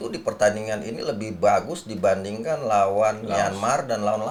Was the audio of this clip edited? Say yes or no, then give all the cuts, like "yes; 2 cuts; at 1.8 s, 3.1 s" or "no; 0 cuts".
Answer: no; 0 cuts